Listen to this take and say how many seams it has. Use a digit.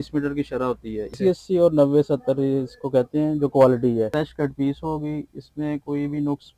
2